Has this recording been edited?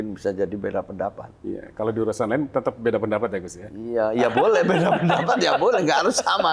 no; 0 cuts

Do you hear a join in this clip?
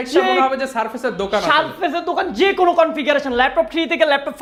no; 0 cuts

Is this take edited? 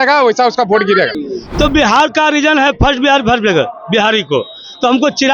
yes; 1 cut; at 1.2 s

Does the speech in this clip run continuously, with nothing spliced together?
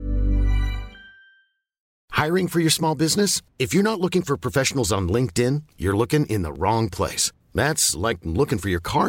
no; 1 cut; at 1.9 s

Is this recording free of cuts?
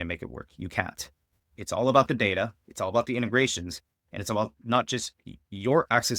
no; 1 cut; at 1.5 s

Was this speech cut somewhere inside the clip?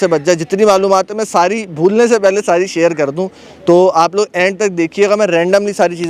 no; 0 cuts

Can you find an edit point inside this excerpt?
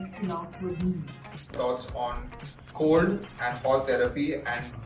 yes; 1 cut; at 1.5 s

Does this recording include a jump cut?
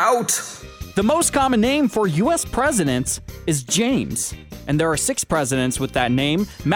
no; 0 cuts

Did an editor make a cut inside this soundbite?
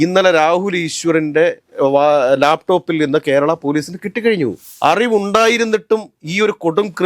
yes; 1 cut; at 4.6 s

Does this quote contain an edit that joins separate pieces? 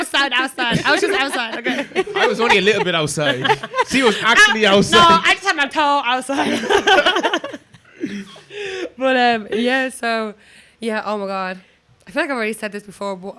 no; 0 cuts

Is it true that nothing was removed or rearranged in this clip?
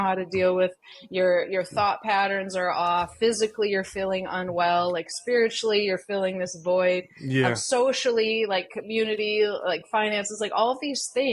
yes; 0 cuts

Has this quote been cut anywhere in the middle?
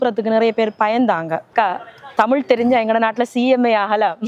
yes; 1 cut; at 1.5 s

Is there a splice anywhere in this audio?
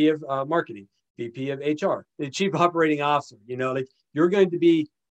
yes; 1 cut; at 2.2 s

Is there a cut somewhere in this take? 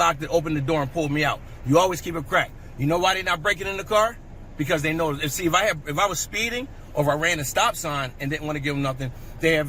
no; 0 cuts

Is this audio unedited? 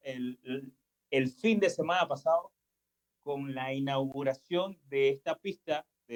yes; 0 cuts

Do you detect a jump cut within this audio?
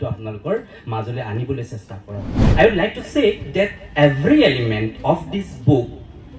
yes; 1 cut; at 2.4 s

